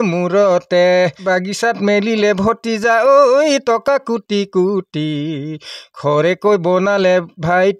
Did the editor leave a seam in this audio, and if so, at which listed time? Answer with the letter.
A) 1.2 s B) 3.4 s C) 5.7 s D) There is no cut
A